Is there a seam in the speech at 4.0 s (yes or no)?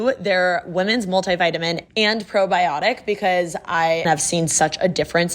yes